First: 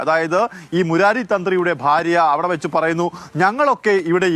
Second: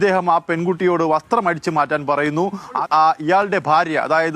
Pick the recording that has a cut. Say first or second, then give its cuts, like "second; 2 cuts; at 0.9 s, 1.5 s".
second; 1 cut; at 2.8 s